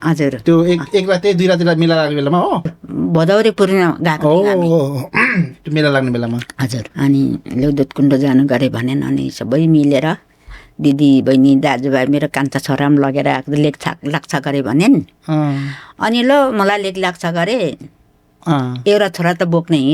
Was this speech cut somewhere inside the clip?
yes; 2 cuts; at 2.8 s, 6.8 s

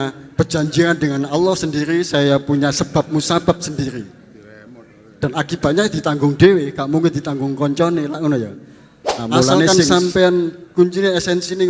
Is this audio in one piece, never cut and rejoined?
no; 1 cut; at 9.7 s

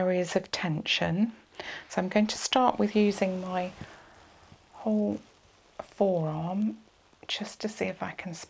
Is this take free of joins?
yes; 0 cuts

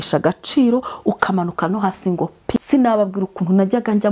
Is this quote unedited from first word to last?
no; 1 cut; at 2.6 s

